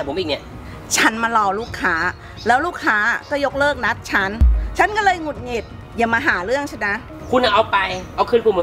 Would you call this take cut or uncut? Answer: cut